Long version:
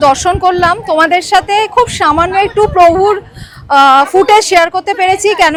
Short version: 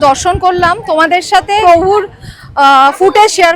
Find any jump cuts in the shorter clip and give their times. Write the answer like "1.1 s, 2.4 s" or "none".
1.6 s